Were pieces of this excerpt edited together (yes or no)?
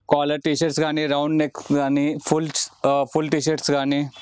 no